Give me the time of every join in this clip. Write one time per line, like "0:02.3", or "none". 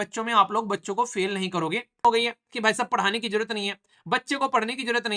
0:02.0